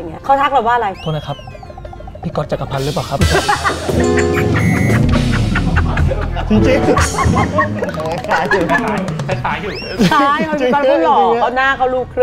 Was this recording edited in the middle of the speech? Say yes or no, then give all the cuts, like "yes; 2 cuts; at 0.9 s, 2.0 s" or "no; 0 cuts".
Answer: no; 0 cuts